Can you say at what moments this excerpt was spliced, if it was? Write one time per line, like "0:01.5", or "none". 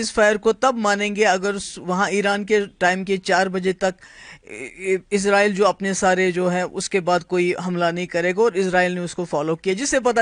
none